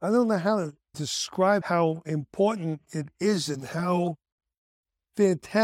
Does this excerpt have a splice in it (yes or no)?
yes